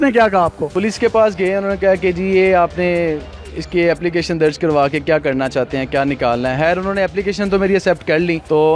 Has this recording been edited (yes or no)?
no